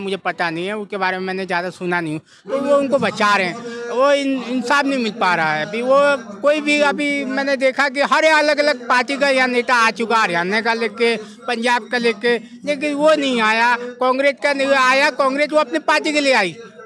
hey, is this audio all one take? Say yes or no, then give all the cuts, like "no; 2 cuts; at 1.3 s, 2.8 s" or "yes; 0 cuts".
yes; 0 cuts